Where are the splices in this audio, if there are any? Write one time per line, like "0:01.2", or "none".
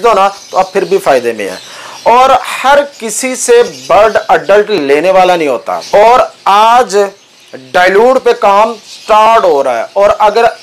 0:05.6